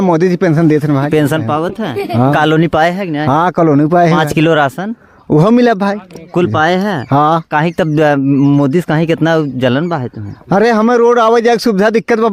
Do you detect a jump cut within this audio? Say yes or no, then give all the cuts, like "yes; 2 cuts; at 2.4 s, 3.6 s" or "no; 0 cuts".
no; 0 cuts